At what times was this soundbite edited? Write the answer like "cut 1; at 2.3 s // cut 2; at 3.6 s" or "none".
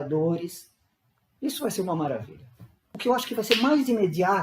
cut 1; at 2.9 s

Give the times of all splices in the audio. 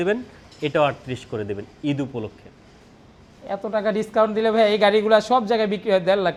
none

